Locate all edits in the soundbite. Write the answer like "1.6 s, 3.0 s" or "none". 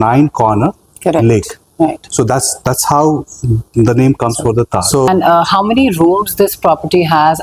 5.1 s